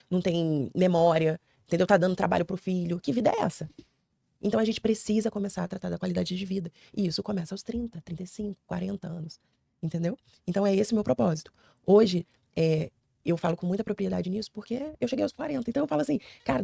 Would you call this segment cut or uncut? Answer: uncut